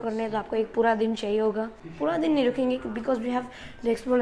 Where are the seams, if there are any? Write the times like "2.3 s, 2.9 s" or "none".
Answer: none